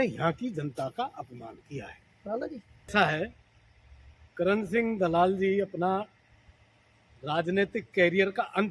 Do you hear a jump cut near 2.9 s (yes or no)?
yes